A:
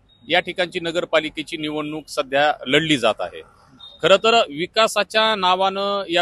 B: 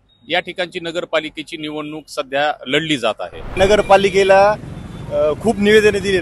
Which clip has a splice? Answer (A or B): B